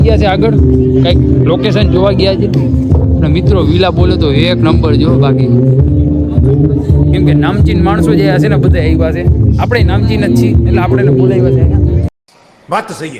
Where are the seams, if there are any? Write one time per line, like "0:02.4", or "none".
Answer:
none